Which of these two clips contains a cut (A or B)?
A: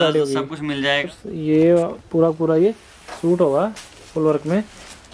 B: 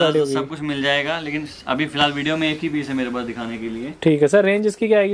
A